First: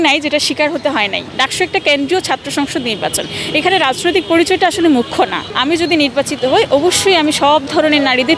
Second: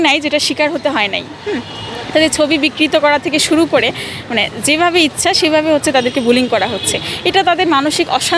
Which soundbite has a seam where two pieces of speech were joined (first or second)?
first